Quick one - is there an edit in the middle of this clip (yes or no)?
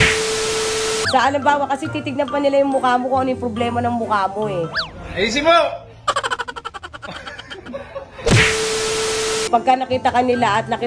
yes